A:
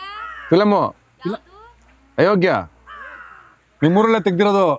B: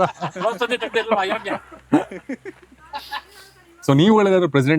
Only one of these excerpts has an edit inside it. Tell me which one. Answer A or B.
B